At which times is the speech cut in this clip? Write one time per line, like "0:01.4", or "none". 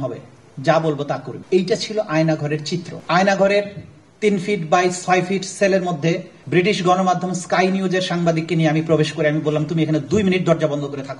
0:01.3
0:02.9
0:06.3